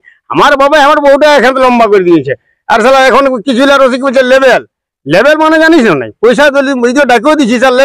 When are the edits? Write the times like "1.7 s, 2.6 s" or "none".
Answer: none